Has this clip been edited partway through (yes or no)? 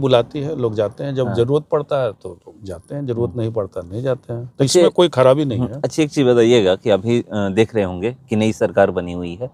no